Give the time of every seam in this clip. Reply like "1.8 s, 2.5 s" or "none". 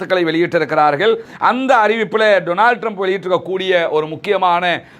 1.2 s